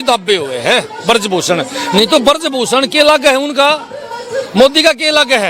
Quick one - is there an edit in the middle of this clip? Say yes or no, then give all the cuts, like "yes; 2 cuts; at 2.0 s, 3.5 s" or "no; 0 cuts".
no; 0 cuts